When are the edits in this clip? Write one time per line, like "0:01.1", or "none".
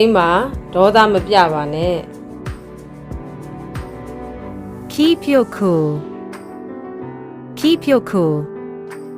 0:06.0
0:07.6
0:08.4